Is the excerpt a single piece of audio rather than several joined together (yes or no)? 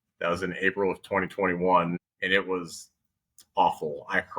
no